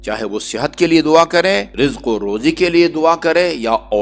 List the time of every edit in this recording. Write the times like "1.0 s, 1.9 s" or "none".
1.7 s